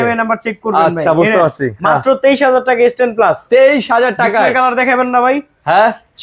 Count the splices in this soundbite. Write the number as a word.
zero